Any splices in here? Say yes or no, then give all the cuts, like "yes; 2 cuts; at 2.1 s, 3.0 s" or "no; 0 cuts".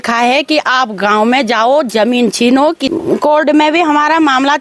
yes; 1 cut; at 2.8 s